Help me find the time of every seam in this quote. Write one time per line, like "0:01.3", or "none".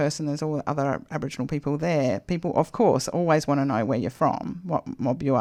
none